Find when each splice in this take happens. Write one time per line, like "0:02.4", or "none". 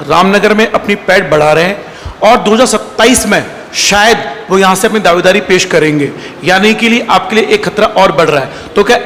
none